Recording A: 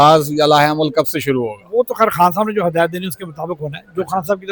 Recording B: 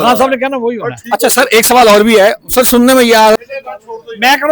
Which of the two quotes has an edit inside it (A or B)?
B